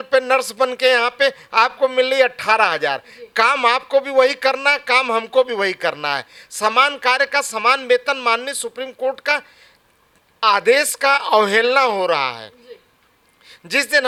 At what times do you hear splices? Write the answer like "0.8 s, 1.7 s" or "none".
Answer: none